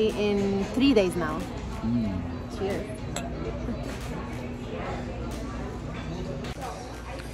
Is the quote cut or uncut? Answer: uncut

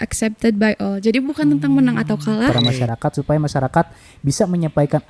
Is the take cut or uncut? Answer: cut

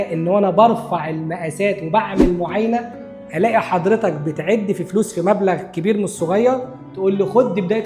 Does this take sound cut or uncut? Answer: uncut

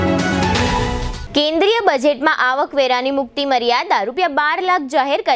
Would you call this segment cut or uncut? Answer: cut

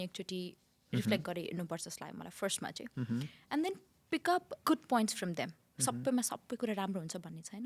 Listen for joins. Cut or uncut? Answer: cut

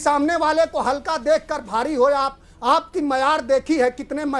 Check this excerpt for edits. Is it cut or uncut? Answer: uncut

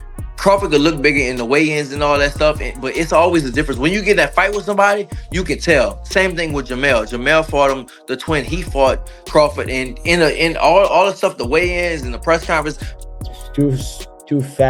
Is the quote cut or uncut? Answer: cut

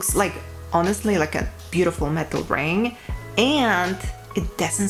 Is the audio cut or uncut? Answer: uncut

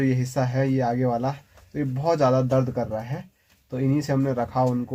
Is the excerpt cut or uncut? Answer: uncut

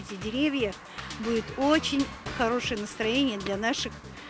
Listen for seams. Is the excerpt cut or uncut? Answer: uncut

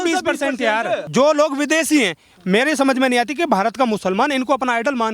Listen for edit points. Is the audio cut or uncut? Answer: cut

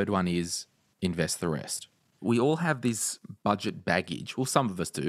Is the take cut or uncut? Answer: cut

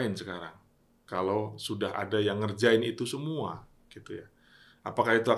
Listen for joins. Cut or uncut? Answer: uncut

